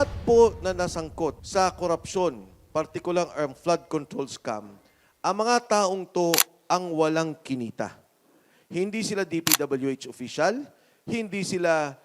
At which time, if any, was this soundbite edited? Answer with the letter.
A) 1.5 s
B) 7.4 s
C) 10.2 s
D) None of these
A